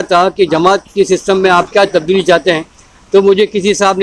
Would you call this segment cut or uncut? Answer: uncut